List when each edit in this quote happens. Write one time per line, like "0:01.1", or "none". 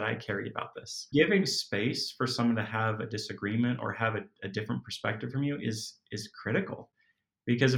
0:01.1